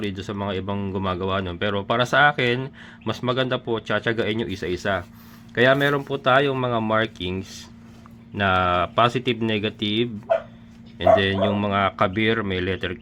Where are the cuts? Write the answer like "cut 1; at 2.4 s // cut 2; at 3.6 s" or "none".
none

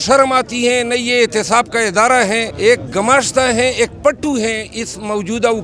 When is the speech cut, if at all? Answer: cut 1; at 2.5 s

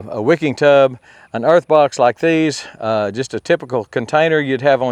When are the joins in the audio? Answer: none

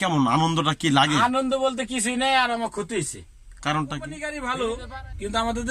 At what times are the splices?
cut 1; at 4.4 s

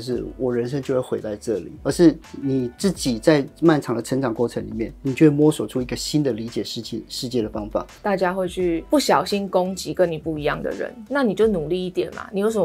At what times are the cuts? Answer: cut 1; at 1.7 s // cut 2; at 7.9 s // cut 3; at 11.0 s

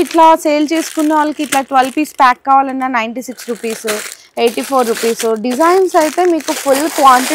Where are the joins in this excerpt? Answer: none

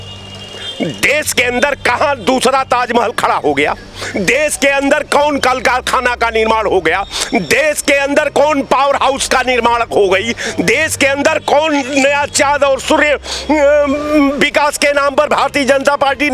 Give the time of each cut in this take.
none

